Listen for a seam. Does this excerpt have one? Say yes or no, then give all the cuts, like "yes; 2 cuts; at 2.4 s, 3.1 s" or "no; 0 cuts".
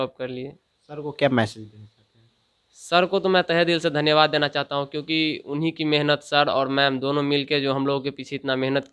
no; 0 cuts